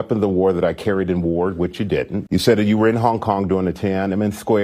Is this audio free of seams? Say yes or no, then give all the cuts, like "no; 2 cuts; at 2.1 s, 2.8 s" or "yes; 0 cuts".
no; 1 cut; at 2.2 s